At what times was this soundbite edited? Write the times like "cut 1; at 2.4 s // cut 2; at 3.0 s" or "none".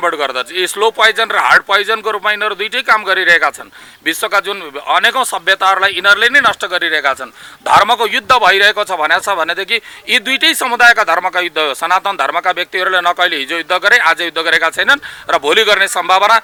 none